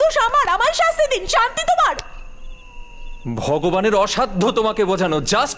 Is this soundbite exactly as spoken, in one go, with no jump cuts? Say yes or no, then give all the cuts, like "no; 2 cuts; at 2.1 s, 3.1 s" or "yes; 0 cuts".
yes; 0 cuts